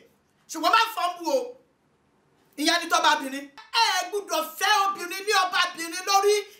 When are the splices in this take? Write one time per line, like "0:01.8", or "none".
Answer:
0:03.6